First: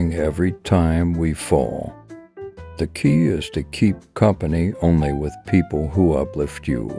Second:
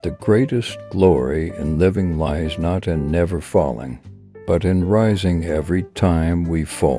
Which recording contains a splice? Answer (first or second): first